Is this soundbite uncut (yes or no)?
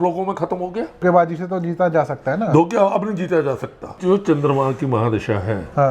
no